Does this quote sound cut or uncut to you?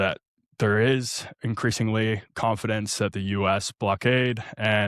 uncut